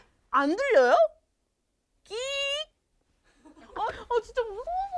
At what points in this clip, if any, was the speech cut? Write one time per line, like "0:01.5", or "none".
0:03.7